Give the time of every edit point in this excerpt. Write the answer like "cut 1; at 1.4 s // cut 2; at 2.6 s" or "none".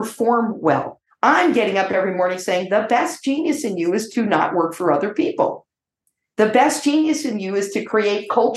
cut 1; at 1.0 s